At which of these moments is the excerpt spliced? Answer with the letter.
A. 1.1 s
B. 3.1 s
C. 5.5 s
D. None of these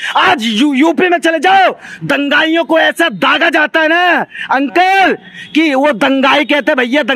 D